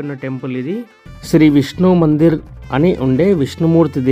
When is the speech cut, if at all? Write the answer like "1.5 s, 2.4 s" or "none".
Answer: 1.1 s